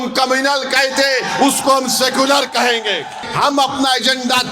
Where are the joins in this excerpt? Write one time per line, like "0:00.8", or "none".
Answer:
0:03.2